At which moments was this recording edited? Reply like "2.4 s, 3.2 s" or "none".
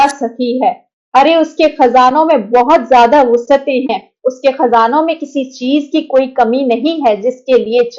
none